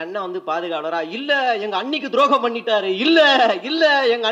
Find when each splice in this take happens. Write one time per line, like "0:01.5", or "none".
none